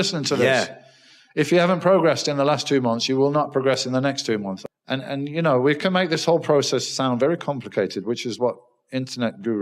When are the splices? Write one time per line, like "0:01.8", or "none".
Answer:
0:04.5